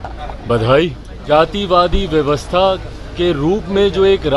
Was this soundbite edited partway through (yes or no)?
yes